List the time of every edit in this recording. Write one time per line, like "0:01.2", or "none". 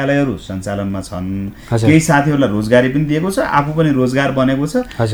none